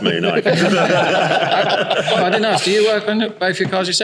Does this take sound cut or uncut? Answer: uncut